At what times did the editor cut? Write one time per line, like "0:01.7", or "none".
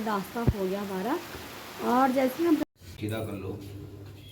0:02.6